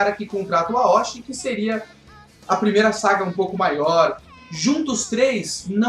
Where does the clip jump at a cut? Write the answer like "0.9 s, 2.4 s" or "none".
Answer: 1.7 s